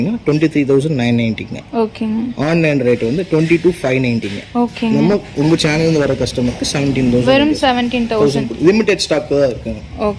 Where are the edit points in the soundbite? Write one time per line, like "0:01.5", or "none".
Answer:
none